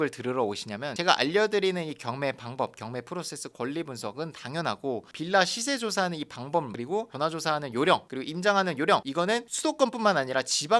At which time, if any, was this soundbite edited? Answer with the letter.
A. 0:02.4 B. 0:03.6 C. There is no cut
C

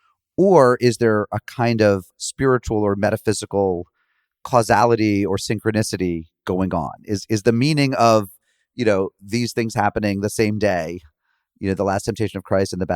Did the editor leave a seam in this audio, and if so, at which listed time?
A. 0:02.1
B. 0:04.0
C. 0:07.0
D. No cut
A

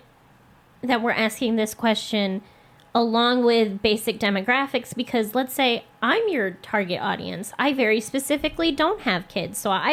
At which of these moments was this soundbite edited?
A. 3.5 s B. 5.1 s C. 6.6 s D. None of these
D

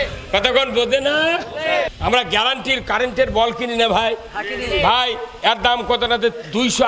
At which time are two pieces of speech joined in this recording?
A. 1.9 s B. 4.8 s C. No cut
A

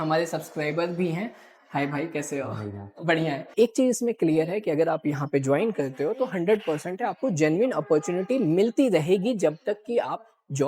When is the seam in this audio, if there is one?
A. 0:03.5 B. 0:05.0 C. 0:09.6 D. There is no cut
A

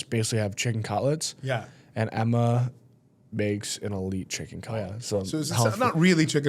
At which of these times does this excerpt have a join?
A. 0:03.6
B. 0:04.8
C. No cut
B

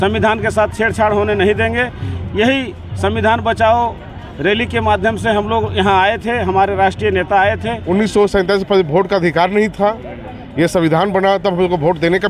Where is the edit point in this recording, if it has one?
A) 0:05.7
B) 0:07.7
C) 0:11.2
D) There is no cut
B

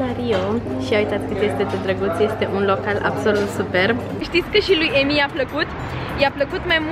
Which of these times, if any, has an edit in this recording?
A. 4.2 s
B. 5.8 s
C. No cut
A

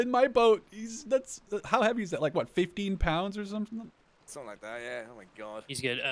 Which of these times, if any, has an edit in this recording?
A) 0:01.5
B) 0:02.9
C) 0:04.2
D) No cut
D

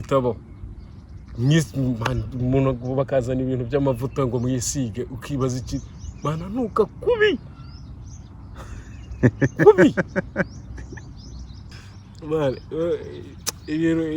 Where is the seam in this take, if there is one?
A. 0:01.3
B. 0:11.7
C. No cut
B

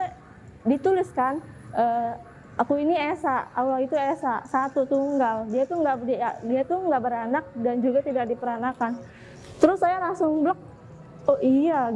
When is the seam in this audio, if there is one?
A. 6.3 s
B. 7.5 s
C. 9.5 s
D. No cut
D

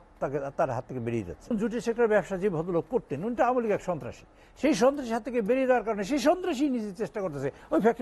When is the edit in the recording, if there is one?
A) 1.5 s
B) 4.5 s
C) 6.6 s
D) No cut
A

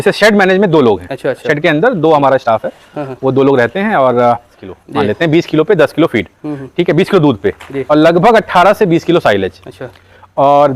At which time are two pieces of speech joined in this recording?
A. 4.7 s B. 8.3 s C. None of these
A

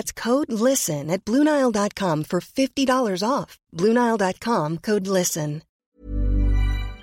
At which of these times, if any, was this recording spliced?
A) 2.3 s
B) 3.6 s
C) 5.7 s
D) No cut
C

